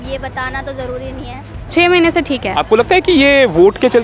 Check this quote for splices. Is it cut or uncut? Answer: cut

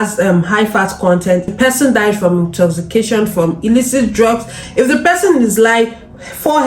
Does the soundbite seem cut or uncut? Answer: cut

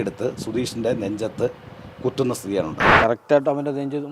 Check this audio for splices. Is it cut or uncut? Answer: cut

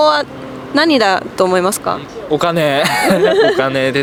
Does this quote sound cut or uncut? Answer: uncut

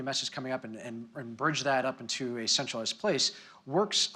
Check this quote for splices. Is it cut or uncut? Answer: uncut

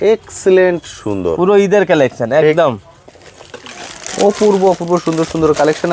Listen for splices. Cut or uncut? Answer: uncut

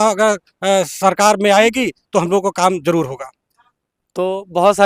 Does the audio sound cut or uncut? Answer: uncut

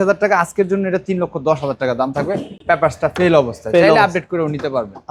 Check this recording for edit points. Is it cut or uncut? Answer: uncut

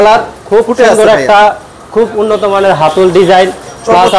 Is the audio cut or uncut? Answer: uncut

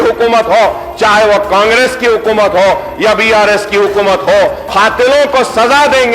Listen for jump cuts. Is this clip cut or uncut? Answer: cut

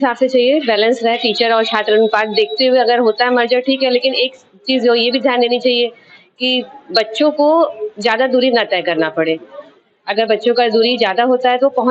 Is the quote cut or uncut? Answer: uncut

